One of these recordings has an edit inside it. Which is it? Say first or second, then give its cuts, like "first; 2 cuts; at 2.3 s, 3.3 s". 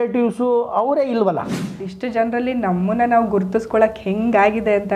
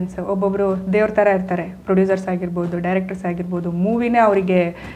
first; 1 cut; at 1.6 s